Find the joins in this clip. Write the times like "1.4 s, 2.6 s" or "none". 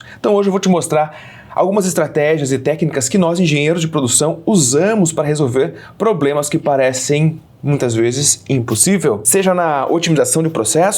9.2 s